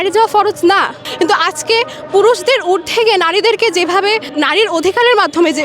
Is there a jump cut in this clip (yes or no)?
yes